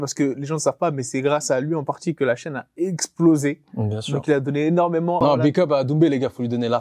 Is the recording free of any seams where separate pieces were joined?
no; 1 cut; at 5.2 s

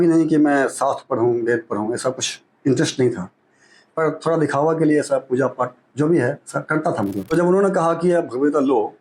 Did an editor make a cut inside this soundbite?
yes; 1 cut; at 7.3 s

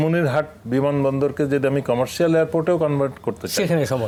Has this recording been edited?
no; 0 cuts

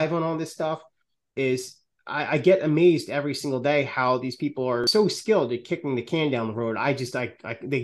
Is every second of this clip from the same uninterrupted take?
no; 1 cut; at 4.9 s

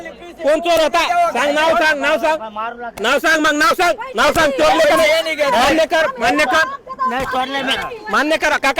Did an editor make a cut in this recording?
no; 0 cuts

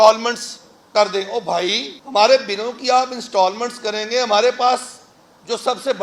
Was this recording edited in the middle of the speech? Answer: yes; 1 cut; at 1.9 s

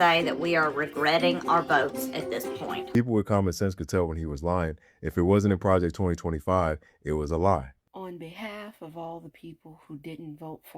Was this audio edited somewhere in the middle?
yes; 2 cuts; at 2.9 s, 7.8 s

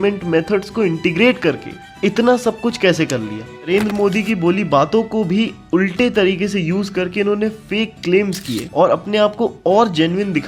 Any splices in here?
yes; 1 cut; at 3.6 s

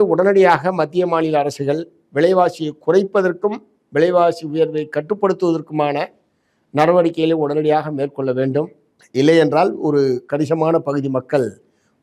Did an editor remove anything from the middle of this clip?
no; 0 cuts

